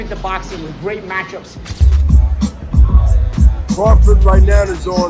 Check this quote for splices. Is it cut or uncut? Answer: cut